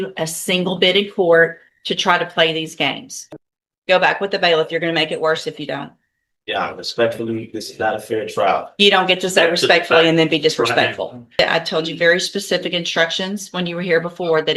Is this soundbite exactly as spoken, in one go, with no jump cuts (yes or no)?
no